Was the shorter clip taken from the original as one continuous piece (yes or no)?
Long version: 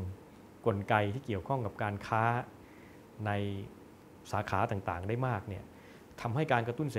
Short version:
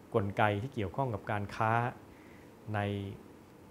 yes